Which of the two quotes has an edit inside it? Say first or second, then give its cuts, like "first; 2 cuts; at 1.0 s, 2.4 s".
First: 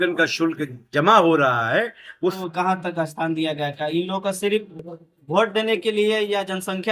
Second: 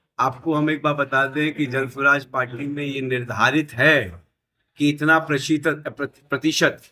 first; 1 cut; at 2.4 s